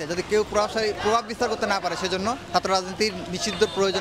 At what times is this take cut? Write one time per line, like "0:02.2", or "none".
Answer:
none

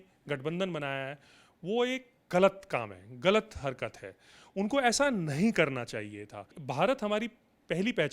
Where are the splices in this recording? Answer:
0:06.6

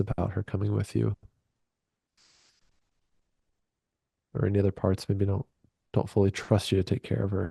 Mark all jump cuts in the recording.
none

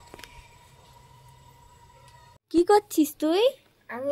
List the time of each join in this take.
0:02.5

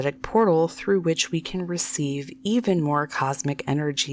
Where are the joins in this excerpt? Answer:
none

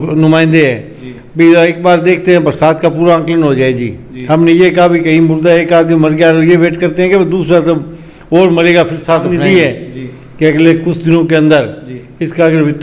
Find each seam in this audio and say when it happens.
0:09.2

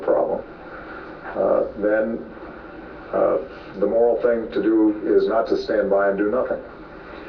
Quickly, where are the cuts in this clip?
0:05.3

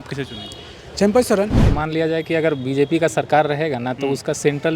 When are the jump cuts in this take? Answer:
0:01.6

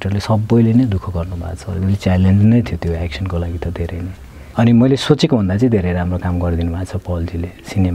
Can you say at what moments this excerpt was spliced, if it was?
0:04.5

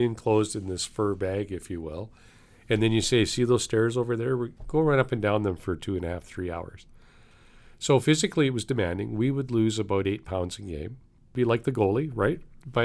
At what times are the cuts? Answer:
0:11.3

